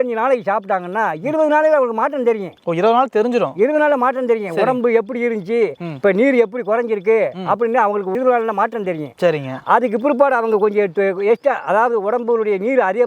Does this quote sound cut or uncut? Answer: uncut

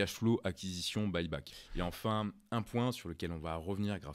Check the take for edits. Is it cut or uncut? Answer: cut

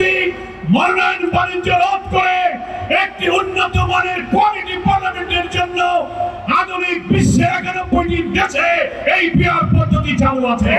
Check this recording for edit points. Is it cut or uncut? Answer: uncut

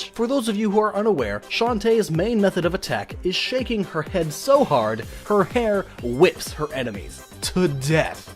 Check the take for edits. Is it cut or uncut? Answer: cut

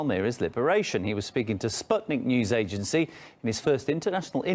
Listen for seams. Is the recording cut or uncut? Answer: cut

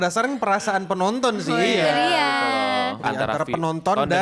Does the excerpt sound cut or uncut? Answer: cut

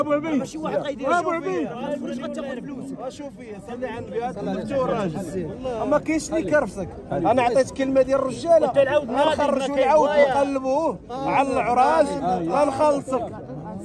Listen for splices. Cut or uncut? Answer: uncut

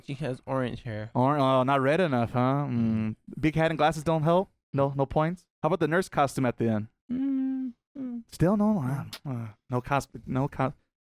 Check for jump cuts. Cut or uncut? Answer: cut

